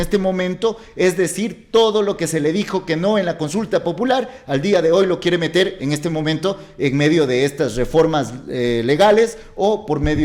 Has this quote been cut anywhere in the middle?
no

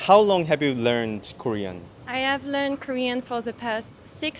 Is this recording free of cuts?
yes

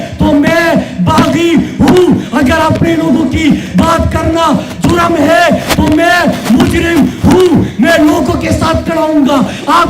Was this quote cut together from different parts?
no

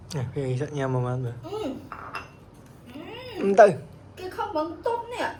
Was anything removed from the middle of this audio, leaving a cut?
no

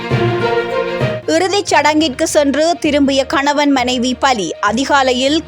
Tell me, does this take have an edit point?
yes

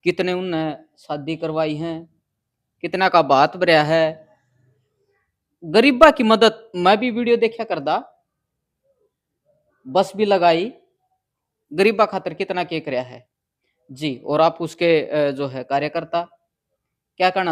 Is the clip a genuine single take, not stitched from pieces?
yes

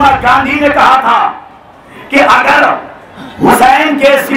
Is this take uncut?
yes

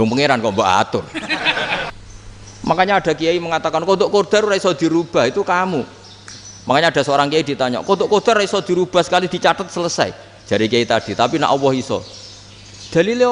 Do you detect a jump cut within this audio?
yes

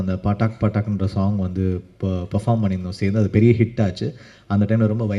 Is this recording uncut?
yes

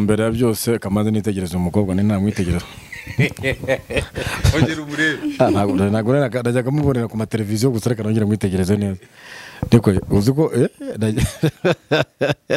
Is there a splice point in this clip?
no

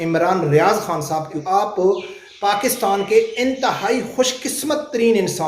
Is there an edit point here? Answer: yes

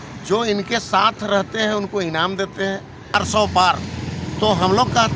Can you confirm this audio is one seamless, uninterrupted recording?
no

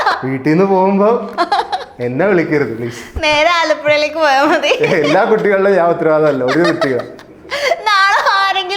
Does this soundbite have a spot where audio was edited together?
no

